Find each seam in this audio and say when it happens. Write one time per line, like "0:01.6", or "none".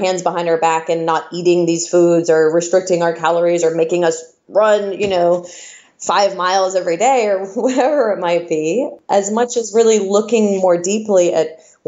0:09.0